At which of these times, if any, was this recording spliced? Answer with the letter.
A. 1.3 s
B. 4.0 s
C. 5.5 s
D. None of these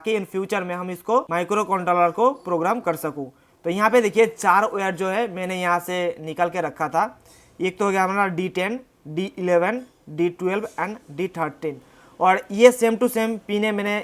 A